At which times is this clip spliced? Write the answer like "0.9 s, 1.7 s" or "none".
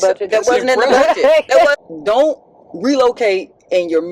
1.7 s